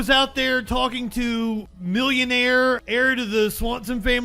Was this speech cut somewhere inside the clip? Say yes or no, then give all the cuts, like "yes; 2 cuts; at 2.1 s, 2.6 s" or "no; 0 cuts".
yes; 2 cuts; at 1.7 s, 2.8 s